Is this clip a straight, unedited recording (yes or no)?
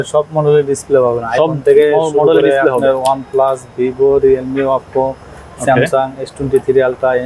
yes